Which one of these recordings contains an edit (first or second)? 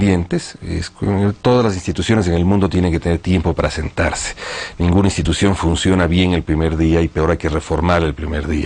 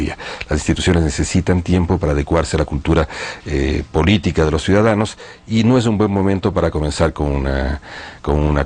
first